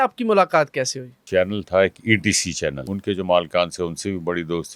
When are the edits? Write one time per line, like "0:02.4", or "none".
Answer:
0:01.2
0:02.9